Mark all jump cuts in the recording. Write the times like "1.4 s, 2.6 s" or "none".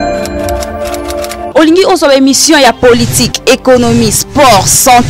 0.9 s